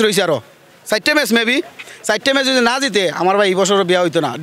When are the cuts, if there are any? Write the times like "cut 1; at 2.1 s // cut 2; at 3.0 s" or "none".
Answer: none